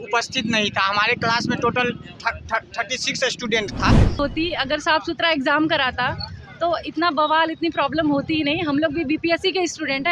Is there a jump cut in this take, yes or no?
yes